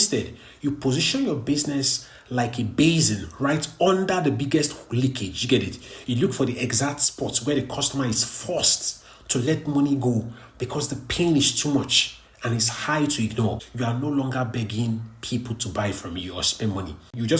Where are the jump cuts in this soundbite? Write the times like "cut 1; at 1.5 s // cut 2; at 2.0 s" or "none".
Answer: cut 1; at 13.7 s